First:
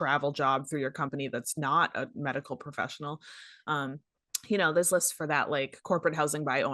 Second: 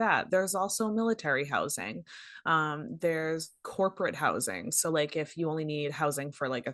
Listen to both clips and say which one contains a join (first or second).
second